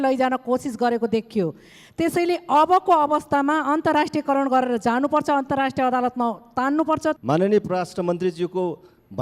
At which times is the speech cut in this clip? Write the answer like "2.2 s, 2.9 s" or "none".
7.2 s